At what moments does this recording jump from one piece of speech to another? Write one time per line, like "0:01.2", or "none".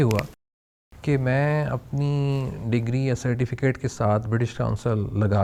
none